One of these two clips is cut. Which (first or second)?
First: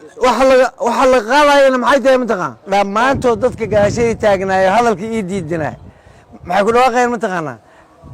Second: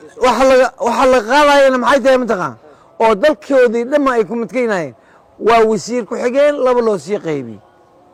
first